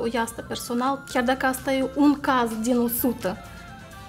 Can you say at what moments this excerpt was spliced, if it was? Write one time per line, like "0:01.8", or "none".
0:01.0

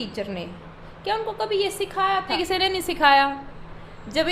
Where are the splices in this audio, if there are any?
0:02.3

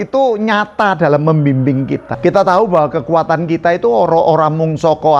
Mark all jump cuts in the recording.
0:02.0

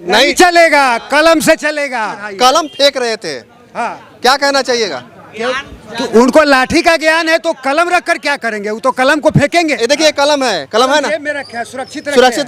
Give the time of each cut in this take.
0:02.2
0:09.8

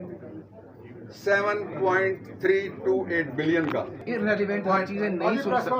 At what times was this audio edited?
0:04.0

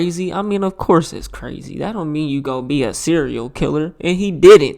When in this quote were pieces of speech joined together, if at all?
none

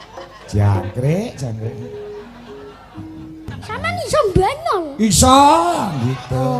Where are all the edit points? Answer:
0:03.5

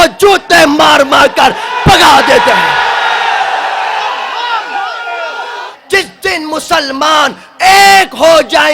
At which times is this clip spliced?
0:05.7

